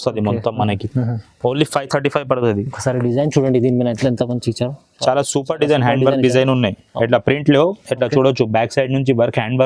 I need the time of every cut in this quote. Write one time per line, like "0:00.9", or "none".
none